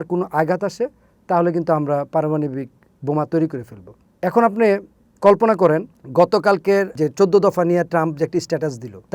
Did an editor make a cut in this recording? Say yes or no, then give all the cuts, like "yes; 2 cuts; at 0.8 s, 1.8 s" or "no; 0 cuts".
no; 0 cuts